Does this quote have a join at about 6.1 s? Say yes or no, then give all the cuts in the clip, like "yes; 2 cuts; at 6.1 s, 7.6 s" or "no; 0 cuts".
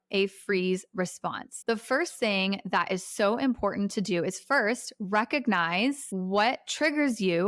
yes; 1 cut; at 6.1 s